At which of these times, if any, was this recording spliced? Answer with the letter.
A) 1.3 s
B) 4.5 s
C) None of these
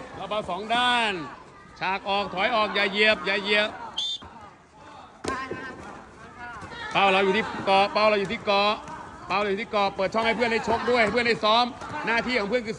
B